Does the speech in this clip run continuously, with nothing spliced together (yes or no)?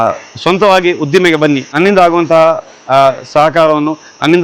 no